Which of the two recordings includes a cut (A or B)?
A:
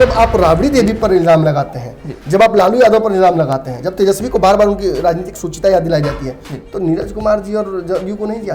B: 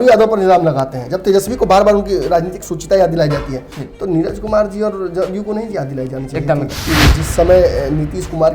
B